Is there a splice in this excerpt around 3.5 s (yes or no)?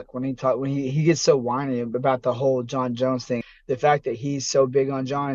yes